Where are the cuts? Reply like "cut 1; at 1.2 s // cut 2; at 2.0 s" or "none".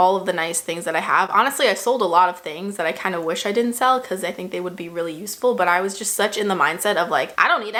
none